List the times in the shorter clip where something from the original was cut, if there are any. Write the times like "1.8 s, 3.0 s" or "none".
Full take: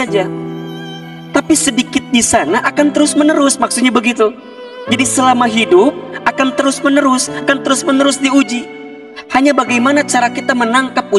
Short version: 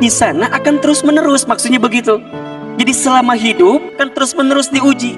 4.0 s